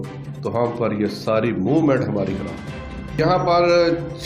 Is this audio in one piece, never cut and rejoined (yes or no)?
no